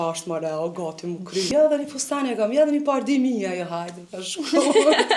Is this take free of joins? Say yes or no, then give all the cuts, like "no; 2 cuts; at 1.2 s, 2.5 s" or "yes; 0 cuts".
no; 1 cut; at 1.5 s